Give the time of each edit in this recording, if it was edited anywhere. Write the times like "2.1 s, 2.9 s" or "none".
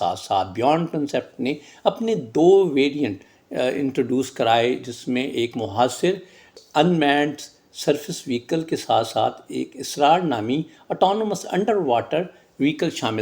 6.7 s